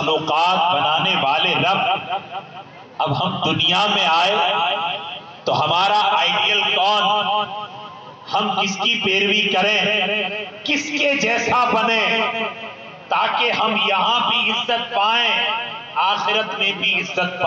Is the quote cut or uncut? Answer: uncut